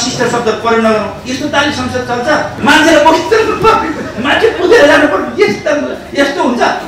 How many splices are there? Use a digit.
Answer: 1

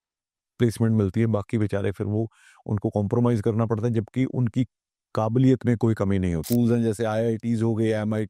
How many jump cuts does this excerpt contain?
1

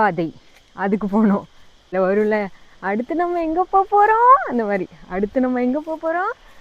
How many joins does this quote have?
1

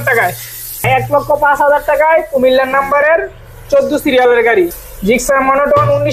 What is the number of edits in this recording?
2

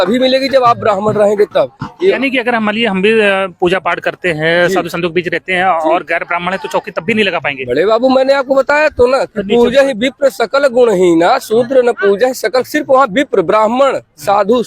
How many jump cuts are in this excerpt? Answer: 1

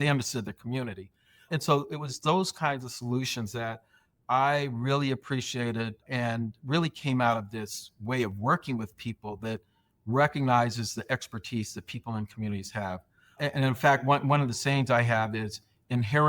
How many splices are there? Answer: 3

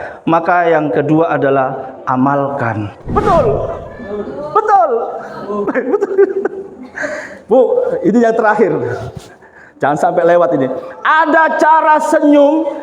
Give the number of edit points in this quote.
1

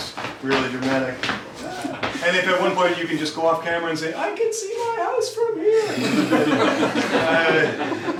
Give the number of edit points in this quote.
0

